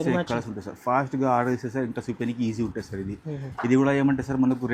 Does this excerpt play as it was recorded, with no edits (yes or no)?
yes